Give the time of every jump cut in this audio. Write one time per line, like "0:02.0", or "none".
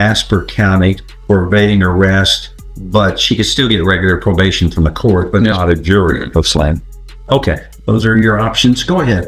none